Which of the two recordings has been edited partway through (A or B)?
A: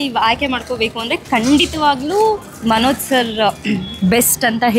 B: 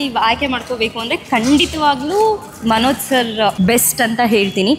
B